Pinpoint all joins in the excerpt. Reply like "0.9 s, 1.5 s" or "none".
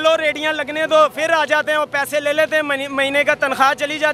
none